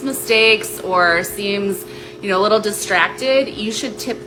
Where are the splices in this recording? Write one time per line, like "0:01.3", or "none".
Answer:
none